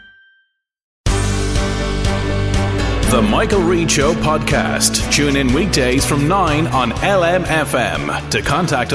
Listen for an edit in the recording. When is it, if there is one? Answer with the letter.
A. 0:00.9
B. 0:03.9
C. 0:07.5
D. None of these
A